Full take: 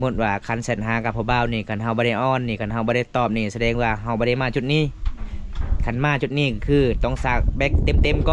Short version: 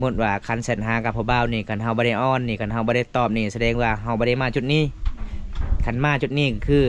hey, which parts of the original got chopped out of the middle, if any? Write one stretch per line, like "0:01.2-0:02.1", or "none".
none